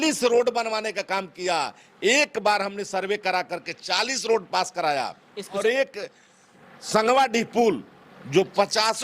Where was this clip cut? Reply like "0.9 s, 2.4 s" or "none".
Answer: 5.6 s